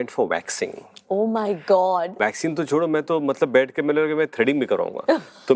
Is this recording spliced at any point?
yes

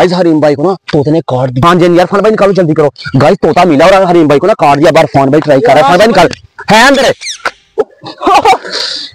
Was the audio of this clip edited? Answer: yes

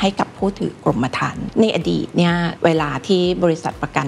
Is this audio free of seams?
no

